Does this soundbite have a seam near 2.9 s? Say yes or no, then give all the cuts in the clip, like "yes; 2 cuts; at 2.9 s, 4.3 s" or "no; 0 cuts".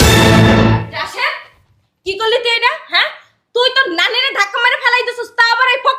no; 1 cut; at 1.0 s